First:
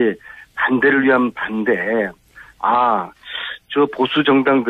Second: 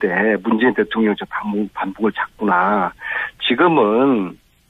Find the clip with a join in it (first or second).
second